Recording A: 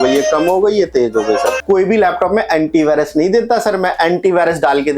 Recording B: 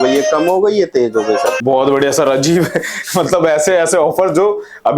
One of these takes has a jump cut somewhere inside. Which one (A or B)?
A